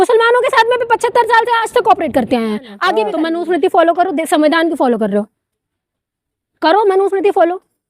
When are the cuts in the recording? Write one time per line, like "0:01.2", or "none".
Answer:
0:03.1